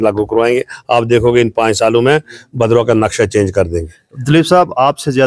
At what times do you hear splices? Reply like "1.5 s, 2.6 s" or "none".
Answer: none